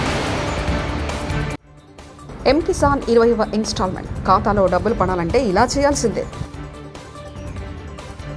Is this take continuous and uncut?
no; 1 cut; at 1.7 s

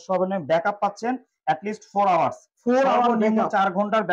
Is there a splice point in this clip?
no; 0 cuts

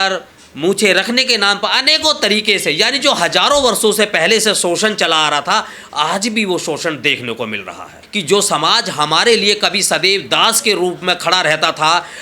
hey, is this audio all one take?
no; 1 cut; at 8.0 s

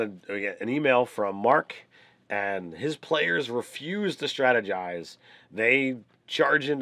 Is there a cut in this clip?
yes; 1 cut; at 3.9 s

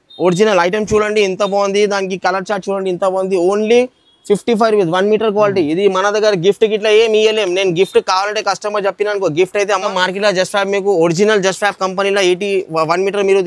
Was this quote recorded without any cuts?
no; 1 cut; at 9.9 s

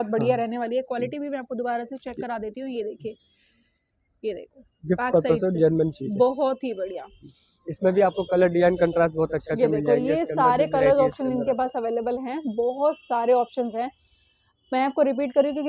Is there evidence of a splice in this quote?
no; 0 cuts

